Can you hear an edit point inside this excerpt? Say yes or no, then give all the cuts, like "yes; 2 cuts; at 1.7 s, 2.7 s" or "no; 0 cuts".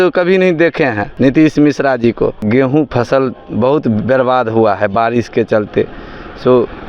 yes; 2 cuts; at 1.1 s, 2.4 s